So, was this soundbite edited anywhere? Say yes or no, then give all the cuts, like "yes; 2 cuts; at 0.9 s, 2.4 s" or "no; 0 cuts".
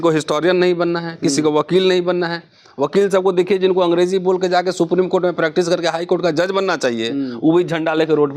no; 0 cuts